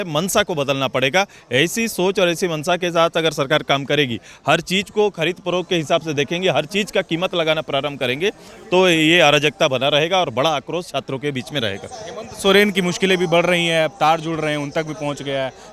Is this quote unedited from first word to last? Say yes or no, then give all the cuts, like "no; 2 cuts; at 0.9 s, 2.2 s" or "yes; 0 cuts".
yes; 0 cuts